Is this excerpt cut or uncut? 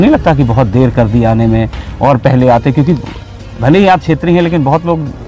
uncut